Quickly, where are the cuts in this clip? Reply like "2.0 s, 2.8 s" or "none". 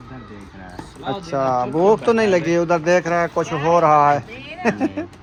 none